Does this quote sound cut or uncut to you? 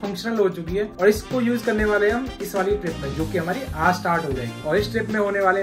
uncut